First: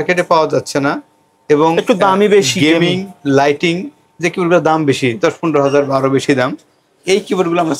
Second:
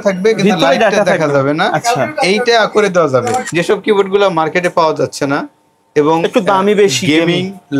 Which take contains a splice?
second; 1 cut; at 3.5 s

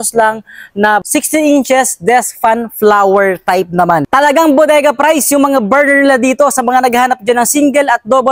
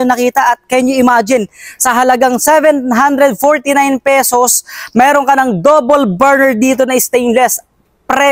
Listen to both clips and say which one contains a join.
first; 2 cuts; at 1.1 s, 4.1 s

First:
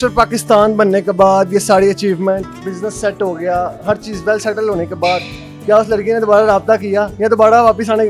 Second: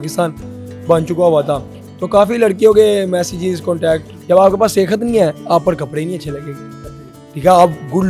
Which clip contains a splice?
second; 1 cut; at 4.1 s

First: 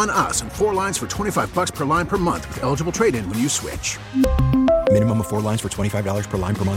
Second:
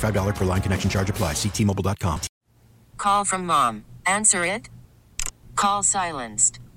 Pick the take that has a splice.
second; 1 cut; at 2.3 s

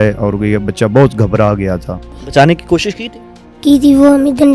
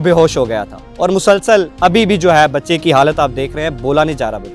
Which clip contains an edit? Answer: second; 1 cut; at 1.7 s

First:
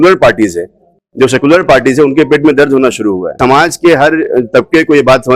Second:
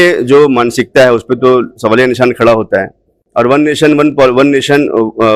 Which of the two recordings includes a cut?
first; 1 cut; at 3.4 s

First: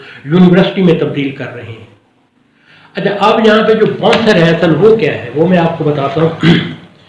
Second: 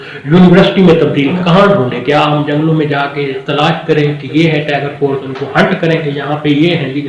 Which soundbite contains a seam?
second; 1 cut; at 1.4 s

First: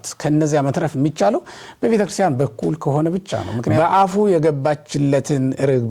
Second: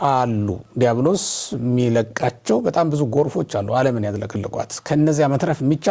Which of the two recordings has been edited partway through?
first; 1 cut; at 3.8 s

